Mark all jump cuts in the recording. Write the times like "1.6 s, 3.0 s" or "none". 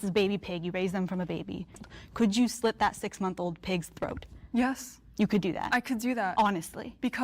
1.8 s